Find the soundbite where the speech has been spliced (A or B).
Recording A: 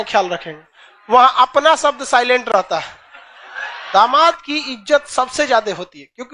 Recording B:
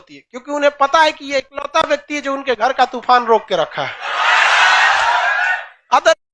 A